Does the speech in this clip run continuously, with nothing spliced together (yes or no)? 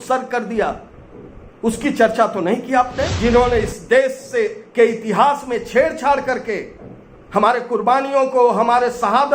no